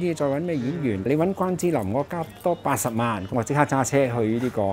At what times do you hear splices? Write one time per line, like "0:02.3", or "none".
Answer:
0:01.1
0:03.3